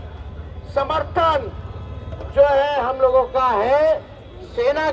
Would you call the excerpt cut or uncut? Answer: uncut